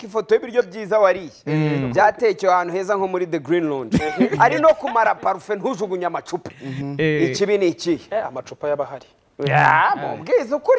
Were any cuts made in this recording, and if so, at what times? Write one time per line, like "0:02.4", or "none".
none